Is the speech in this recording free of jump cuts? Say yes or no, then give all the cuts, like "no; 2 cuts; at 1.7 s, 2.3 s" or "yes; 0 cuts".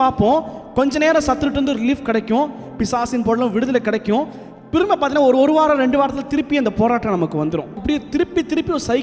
no; 1 cut; at 7.8 s